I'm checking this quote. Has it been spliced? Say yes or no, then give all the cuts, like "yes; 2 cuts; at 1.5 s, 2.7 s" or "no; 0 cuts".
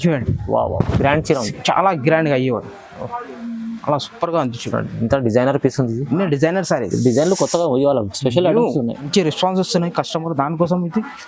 yes; 1 cut; at 9.0 s